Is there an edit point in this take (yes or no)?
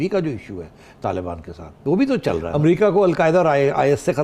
yes